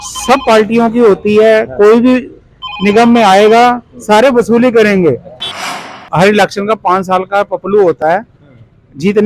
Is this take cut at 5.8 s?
yes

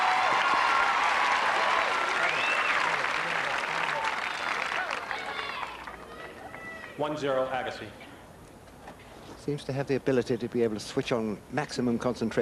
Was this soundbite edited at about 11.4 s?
yes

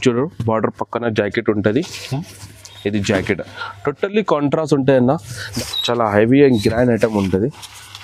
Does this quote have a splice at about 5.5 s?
yes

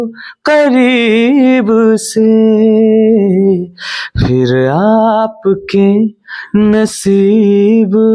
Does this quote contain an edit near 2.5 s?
no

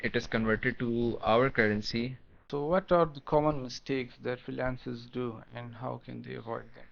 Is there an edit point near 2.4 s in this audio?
yes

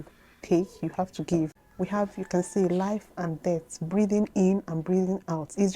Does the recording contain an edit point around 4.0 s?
no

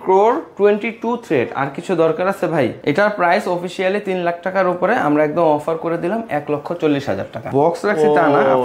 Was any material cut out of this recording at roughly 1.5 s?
no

